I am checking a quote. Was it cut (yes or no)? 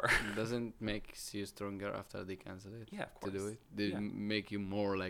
no